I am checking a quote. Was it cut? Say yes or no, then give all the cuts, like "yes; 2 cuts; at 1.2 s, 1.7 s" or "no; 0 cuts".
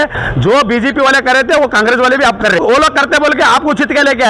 yes; 1 cut; at 2.6 s